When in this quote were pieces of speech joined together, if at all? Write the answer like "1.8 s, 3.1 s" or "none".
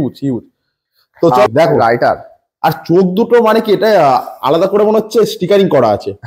1.5 s